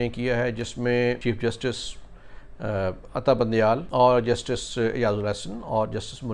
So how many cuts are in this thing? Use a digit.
2